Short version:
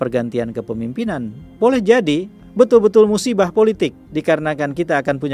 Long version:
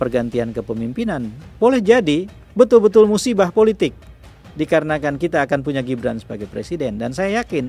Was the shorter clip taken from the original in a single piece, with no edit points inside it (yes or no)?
no